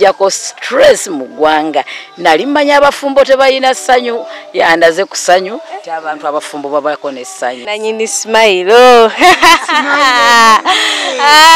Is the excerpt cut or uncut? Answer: cut